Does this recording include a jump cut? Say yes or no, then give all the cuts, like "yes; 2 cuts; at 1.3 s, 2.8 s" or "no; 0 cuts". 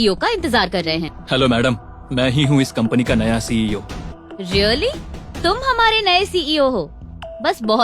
yes; 2 cuts; at 1.1 s, 4.1 s